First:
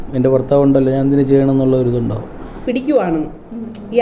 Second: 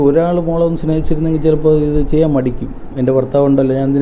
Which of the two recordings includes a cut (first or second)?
first